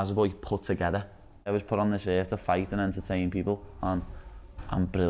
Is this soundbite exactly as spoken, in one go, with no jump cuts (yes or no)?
no